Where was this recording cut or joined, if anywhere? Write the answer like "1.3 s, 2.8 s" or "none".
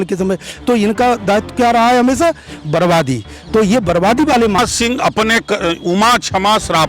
4.6 s